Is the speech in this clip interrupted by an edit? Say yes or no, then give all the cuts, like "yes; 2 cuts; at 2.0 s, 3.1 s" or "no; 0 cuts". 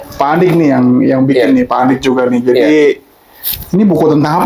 no; 0 cuts